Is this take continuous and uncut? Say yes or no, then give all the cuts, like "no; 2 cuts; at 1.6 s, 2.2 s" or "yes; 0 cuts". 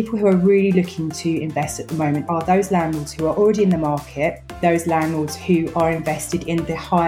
no; 2 cuts; at 2.2 s, 4.6 s